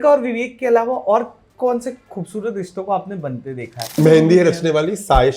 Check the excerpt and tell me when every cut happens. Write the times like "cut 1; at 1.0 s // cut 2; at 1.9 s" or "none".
cut 1; at 3.9 s